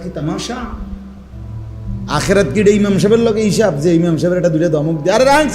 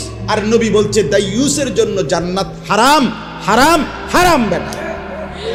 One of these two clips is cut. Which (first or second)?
first